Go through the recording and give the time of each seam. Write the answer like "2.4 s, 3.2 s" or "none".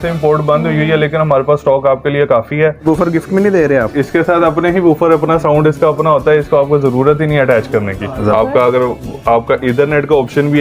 2.8 s, 8.3 s